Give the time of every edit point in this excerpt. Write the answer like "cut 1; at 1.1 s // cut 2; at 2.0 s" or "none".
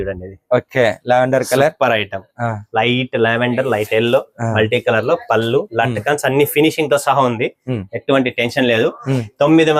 none

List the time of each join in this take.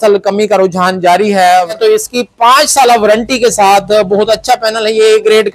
cut 1; at 1.8 s

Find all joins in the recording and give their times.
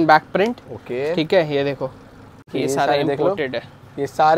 cut 1; at 2.5 s

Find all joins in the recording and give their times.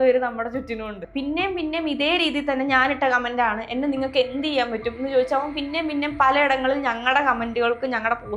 cut 1; at 1.0 s

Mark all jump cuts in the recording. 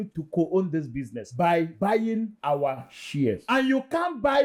none

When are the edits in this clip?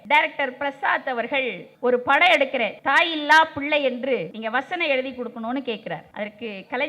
cut 1; at 1.6 s // cut 2; at 2.7 s // cut 3; at 4.3 s // cut 4; at 6.1 s

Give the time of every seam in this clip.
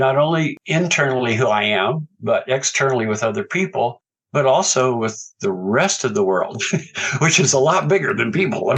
none

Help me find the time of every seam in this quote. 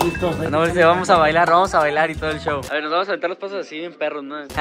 none

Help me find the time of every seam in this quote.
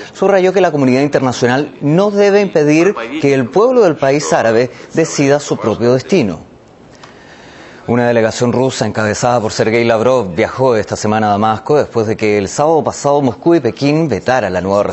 cut 1; at 9.7 s

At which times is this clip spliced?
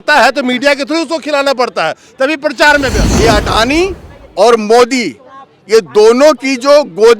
cut 1; at 3.0 s

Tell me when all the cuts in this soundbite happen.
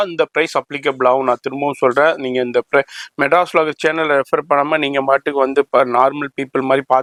none

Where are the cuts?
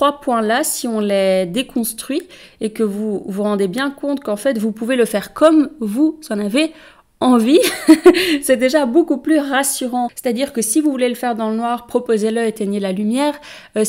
cut 1; at 10.2 s

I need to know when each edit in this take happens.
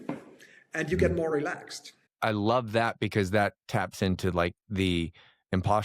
cut 1; at 2.1 s

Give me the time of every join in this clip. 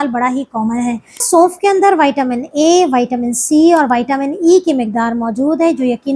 cut 1; at 1.2 s

